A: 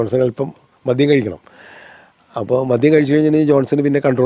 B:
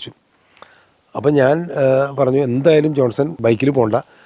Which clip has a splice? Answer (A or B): B